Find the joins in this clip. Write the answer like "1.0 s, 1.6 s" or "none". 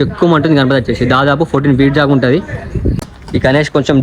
3.0 s